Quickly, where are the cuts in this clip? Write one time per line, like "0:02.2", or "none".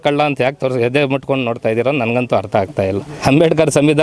0:03.1